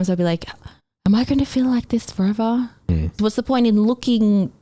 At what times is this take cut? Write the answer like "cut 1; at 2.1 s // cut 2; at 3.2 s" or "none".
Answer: none

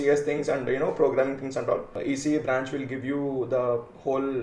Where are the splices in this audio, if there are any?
cut 1; at 2.0 s

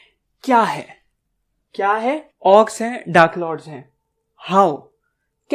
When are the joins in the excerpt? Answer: cut 1; at 2.3 s

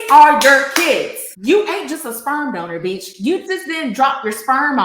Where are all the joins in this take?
none

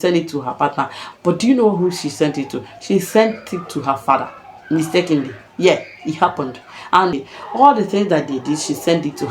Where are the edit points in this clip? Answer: cut 1; at 7.1 s

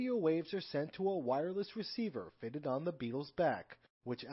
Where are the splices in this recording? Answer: none

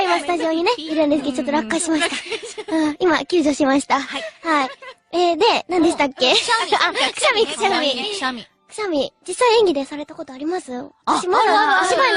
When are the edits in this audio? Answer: cut 1; at 10.7 s

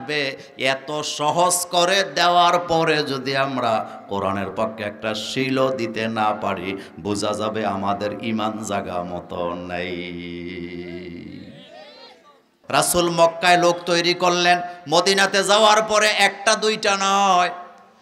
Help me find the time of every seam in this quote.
cut 1; at 12.5 s

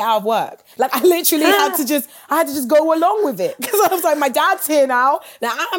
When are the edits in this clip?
none

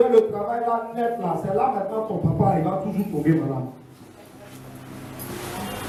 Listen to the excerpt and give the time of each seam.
none

